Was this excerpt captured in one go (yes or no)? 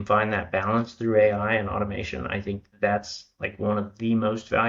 yes